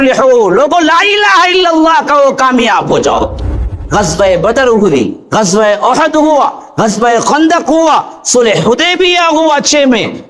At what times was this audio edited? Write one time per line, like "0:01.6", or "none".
0:03.8